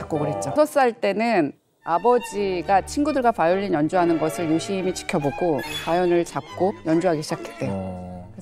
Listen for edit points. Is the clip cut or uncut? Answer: uncut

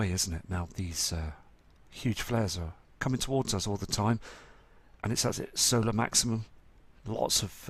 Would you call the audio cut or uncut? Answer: uncut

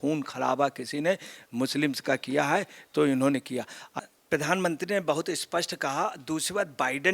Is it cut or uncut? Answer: cut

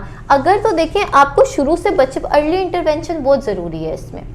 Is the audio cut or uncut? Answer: uncut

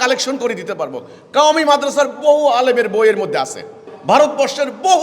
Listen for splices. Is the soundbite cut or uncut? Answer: cut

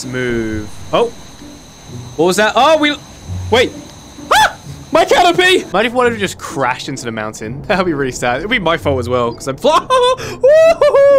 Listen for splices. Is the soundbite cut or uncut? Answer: cut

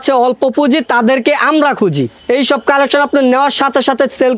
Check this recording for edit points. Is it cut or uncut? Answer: uncut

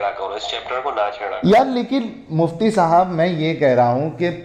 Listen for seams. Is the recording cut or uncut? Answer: uncut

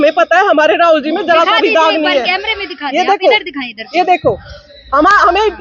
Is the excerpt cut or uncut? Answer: uncut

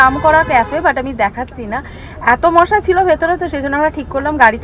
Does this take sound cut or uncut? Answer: uncut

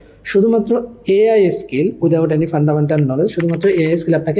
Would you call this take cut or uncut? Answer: uncut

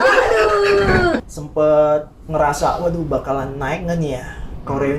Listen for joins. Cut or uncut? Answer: cut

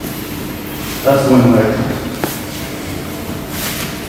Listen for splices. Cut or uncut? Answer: uncut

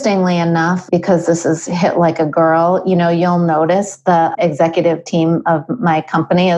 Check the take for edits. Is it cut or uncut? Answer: uncut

